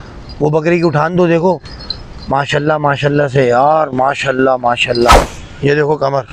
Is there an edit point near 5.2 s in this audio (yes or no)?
yes